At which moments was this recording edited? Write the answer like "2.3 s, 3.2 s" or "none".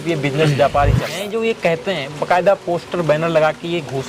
1.1 s